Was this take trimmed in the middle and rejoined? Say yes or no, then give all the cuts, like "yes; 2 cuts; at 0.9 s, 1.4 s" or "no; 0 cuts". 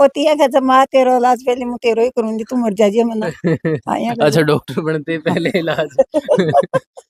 no; 0 cuts